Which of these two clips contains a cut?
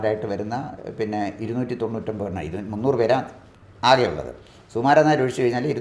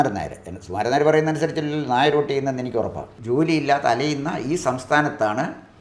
second; 1 cut; at 3.1 s

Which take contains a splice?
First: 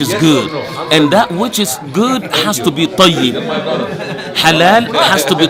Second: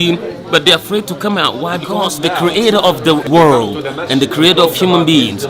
second; 2 cuts; at 2.1 s, 3.3 s

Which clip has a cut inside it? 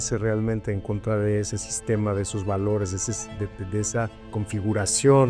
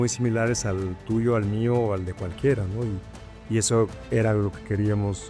first; 1 cut; at 4.3 s

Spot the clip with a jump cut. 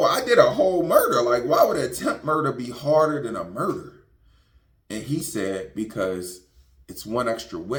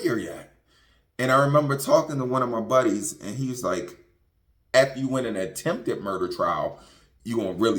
second; 1 cut; at 4.7 s

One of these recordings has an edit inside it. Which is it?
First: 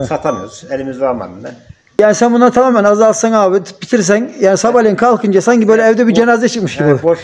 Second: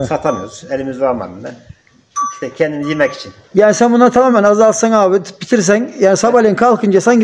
first; 1 cut; at 2.0 s

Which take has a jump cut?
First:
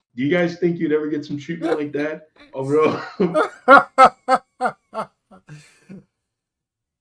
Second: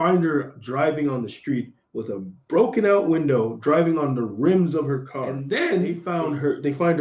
second; 2 cuts; at 5.3 s, 6.0 s

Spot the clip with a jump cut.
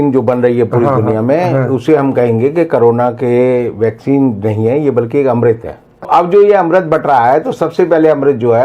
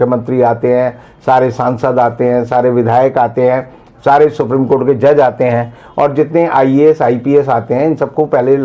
first; 1 cut; at 6.1 s

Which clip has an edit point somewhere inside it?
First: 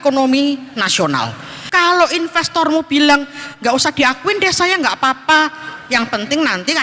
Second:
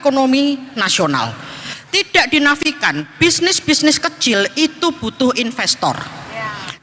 first; 1 cut; at 1.5 s

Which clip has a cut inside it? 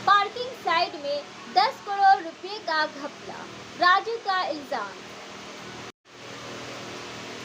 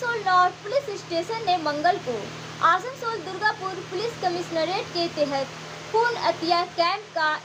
first; 1 cut; at 5.9 s

